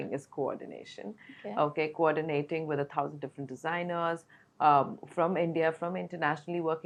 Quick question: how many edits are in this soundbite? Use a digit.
0